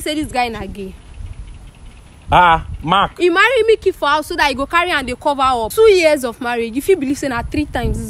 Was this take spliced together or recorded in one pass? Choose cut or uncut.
cut